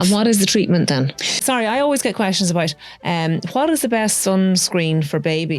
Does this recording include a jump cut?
yes; 1 cut; at 1.4 s

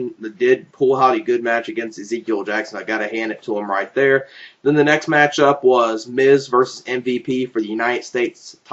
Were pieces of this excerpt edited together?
yes; 1 cut; at 5.9 s

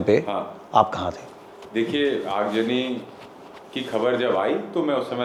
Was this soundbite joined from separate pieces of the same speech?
no; 0 cuts

